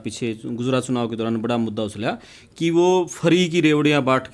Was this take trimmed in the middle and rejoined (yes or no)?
no